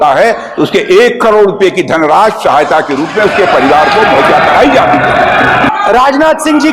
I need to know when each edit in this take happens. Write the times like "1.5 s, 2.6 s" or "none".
5.7 s

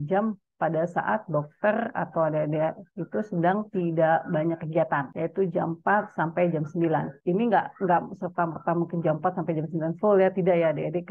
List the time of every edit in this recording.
5.1 s, 7.1 s

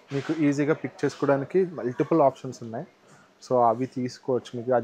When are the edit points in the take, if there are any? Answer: none

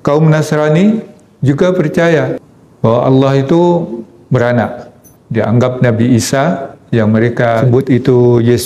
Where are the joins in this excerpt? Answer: 7.6 s

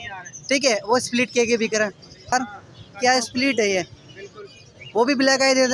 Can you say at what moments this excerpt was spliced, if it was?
2.3 s

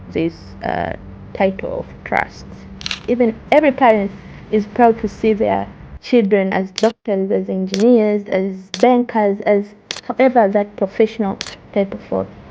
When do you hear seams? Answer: 3.0 s, 8.6 s

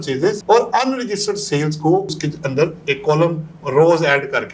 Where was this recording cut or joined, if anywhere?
none

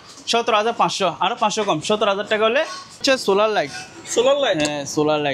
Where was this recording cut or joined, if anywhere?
3.0 s

